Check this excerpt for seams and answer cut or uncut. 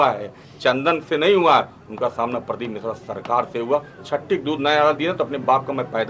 uncut